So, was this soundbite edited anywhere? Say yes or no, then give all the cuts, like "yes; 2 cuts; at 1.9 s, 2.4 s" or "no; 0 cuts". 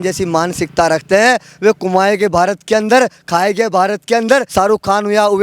yes; 1 cut; at 4.5 s